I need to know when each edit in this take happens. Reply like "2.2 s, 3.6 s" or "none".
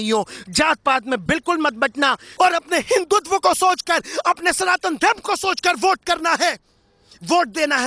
2.3 s

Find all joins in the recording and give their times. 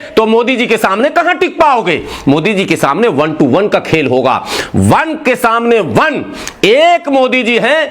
none

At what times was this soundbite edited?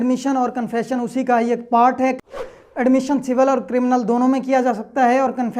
2.3 s

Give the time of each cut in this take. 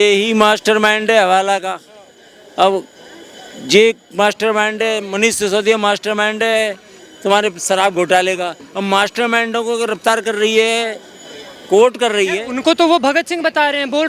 none

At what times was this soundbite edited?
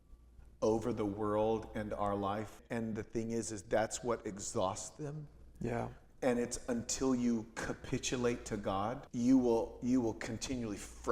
2.6 s, 9.0 s

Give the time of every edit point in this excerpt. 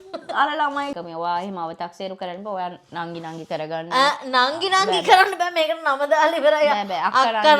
0.9 s

